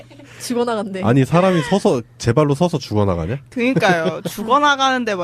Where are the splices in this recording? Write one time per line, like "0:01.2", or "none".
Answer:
none